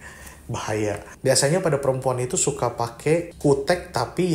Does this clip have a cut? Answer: yes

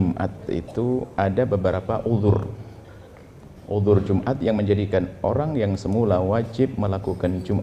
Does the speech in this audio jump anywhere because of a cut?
no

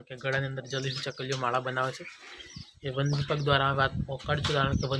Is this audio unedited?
yes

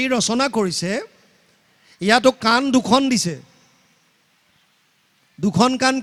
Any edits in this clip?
no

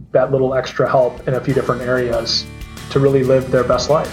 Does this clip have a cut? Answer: yes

